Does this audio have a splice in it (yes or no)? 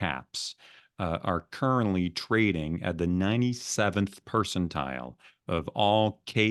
no